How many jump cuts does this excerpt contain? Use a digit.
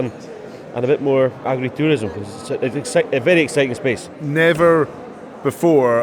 2